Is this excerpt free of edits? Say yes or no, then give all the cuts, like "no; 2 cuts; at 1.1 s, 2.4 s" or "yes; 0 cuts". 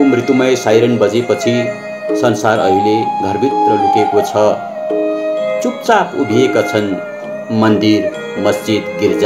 yes; 0 cuts